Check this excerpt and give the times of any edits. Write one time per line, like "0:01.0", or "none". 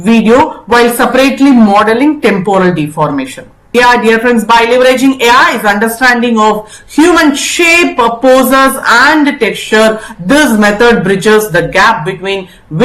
0:03.7